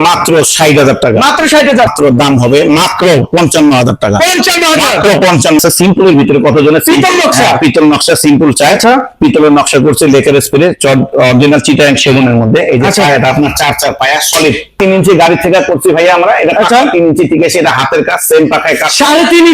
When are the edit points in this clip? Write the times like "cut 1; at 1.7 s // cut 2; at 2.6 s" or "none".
cut 1; at 1.9 s // cut 2; at 5.6 s // cut 3; at 14.8 s